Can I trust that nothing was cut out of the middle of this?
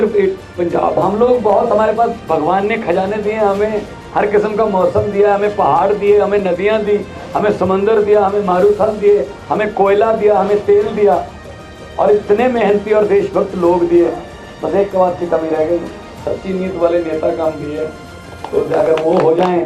no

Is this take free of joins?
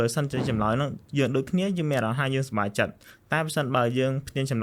yes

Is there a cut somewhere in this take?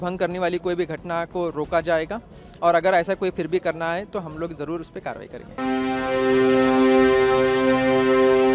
yes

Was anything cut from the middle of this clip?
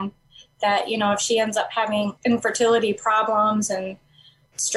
yes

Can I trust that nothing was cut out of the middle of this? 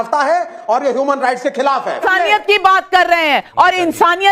no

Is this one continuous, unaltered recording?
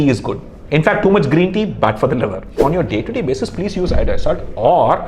no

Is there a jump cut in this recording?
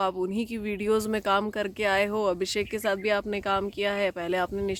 no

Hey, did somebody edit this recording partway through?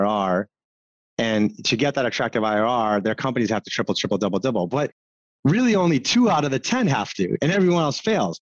no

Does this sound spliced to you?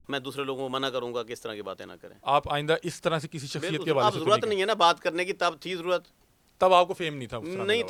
no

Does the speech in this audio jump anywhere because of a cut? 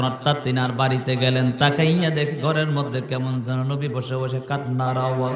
no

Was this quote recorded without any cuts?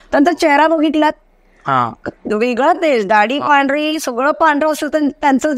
yes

